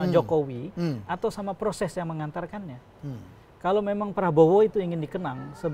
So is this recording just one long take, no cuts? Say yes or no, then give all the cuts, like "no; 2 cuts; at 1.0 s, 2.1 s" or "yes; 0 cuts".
yes; 0 cuts